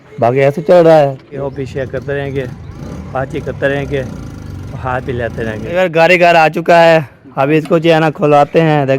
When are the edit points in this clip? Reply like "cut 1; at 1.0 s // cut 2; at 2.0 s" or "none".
cut 1; at 1.4 s // cut 2; at 5.7 s

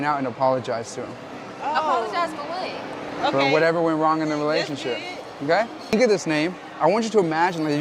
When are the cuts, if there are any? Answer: none

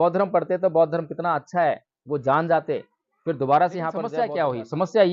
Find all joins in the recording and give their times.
cut 1; at 4.2 s

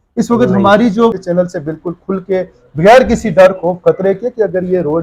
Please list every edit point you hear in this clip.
cut 1; at 1.2 s

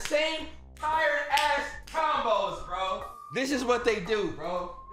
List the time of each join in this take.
cut 1; at 3.2 s

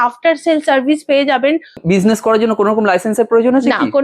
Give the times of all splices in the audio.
cut 1; at 1.8 s

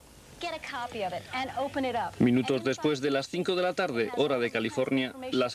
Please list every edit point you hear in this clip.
none

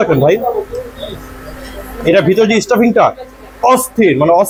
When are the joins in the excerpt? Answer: none

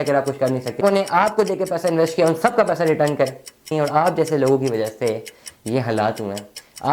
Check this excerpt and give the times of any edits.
cut 1; at 0.8 s // cut 2; at 3.7 s

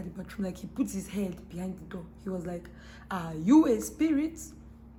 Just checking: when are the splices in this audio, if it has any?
none

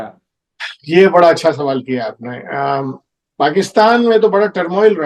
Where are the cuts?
none

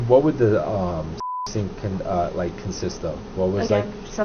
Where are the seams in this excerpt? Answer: none

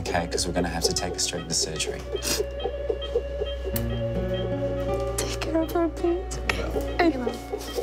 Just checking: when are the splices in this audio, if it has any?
none

